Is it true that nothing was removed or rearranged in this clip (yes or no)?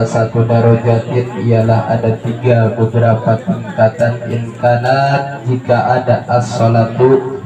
yes